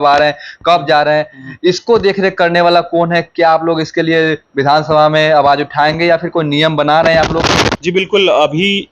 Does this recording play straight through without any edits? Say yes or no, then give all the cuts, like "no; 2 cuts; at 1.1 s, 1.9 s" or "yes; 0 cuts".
no; 1 cut; at 7.8 s